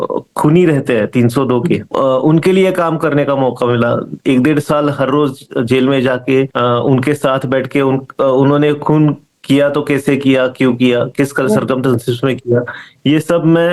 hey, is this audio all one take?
no; 2 cuts; at 1.9 s, 6.5 s

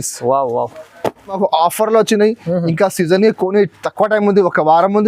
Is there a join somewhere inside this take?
yes; 1 cut; at 1.4 s

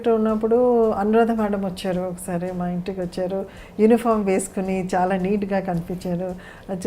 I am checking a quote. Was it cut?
no; 0 cuts

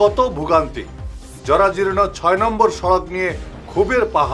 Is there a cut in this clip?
no; 0 cuts

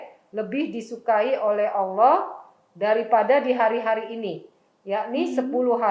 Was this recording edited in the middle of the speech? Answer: no; 0 cuts

